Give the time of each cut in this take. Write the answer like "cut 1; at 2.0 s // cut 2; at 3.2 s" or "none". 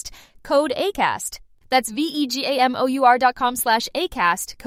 none